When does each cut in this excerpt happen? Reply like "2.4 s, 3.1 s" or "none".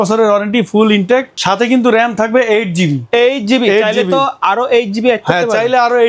1.3 s